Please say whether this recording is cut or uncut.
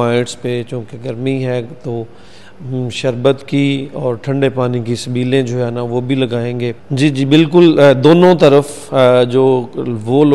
cut